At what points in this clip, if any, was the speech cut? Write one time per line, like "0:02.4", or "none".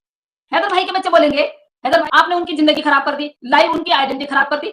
0:02.0